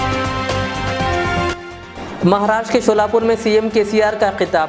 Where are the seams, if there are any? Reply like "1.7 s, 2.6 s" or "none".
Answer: 1.5 s